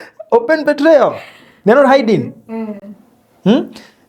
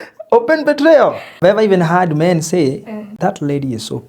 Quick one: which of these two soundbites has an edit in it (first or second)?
second